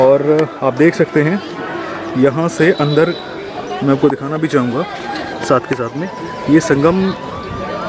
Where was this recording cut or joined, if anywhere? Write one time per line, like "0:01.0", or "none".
none